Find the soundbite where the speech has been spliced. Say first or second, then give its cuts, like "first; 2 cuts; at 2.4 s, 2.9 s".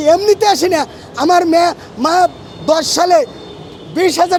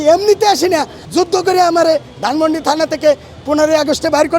second; 1 cut; at 1.0 s